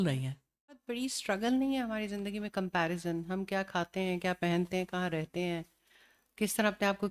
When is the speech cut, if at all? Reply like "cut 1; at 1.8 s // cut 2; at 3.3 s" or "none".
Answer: cut 1; at 1.0 s